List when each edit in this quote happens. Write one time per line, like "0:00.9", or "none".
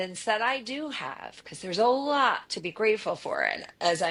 none